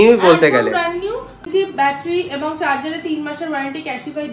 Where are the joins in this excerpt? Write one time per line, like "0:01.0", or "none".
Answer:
0:01.5